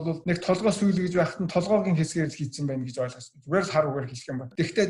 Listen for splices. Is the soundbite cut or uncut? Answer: uncut